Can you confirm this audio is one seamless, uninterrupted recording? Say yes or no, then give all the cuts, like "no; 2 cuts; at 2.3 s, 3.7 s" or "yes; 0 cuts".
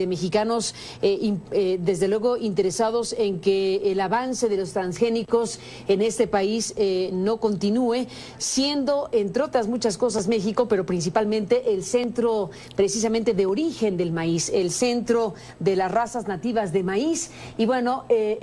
yes; 0 cuts